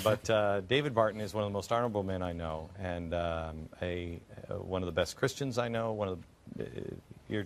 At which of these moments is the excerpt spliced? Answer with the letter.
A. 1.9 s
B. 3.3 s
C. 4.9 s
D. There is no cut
D